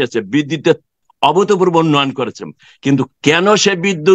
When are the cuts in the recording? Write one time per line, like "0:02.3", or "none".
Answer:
0:01.0